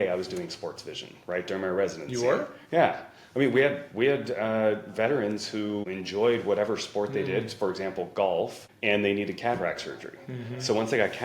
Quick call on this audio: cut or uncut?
cut